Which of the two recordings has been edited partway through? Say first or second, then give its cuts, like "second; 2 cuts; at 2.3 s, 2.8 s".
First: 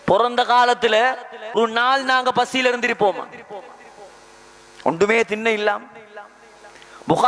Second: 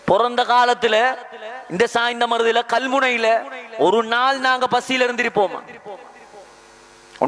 first; 1 cut; at 1.6 s